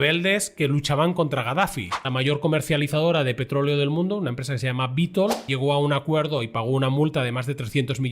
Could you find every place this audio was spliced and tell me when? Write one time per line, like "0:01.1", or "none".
0:02.0
0:05.5

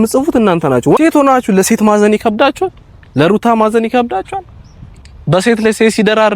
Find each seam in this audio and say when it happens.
0:01.0

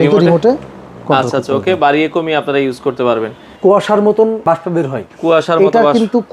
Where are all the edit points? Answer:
0:03.5
0:04.4

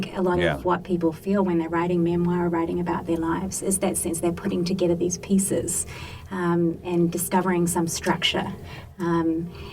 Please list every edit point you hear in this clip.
none

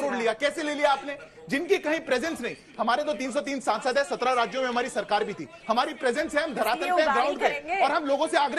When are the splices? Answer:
none

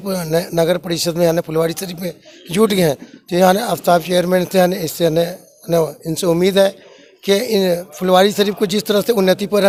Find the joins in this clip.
none

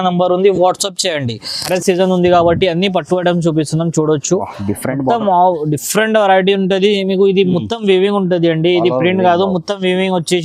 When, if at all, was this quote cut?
0:01.7

